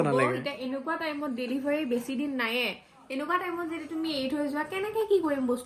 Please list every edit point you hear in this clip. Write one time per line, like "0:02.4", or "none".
none

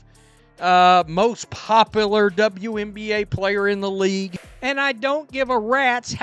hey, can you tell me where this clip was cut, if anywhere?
0:04.4

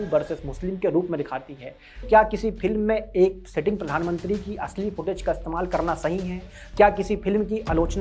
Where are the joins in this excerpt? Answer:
0:02.0

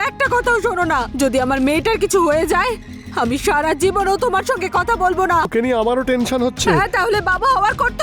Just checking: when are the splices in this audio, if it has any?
0:05.5

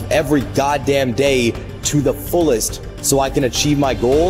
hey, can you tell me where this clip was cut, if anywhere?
none

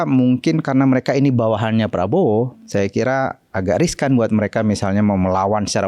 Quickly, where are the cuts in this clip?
none

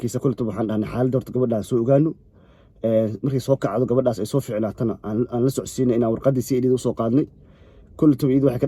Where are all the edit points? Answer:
none

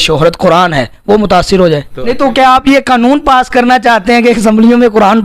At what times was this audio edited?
0:01.9

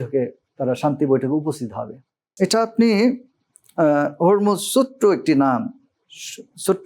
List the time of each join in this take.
0:02.2

